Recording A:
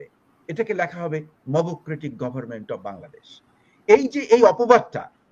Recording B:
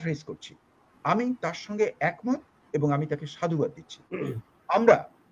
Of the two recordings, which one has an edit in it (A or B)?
B